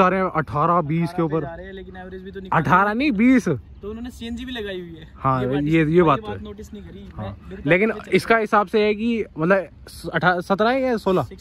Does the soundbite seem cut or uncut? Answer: uncut